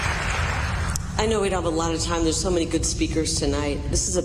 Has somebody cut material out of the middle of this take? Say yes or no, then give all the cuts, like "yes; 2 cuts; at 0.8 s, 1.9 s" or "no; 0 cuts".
no; 0 cuts